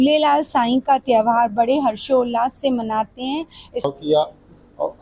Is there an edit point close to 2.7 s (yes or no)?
no